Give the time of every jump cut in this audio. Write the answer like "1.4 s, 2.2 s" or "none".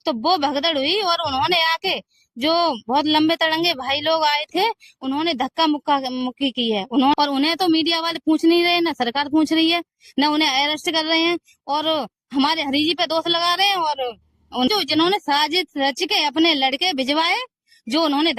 7.1 s, 14.7 s